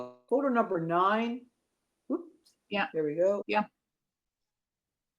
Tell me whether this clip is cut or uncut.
cut